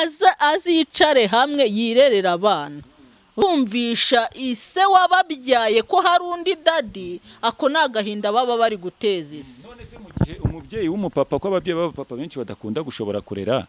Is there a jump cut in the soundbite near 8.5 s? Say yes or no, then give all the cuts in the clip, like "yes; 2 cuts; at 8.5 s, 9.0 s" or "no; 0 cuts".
no; 1 cut; at 3.4 s